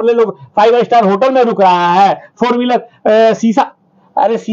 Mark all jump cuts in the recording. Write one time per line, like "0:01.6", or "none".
none